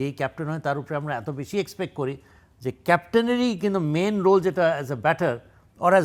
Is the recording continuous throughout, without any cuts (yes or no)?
yes